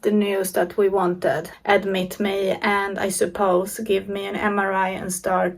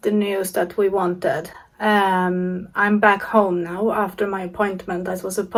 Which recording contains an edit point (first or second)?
first